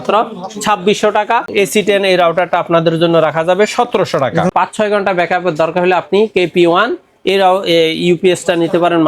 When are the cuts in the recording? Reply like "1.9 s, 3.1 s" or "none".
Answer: 1.5 s, 4.5 s